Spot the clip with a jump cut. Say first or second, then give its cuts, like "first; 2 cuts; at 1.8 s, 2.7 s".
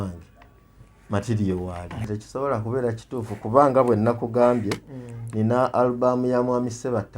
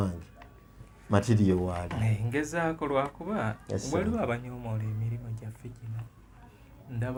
first; 1 cut; at 2.1 s